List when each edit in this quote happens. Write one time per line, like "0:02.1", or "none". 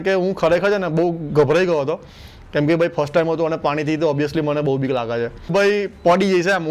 0:05.5